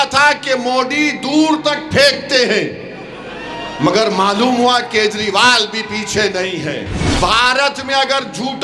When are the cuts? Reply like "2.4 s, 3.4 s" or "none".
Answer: 7.0 s